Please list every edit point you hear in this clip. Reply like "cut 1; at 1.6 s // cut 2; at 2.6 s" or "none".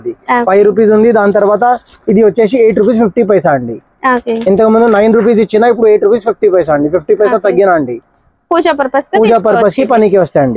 none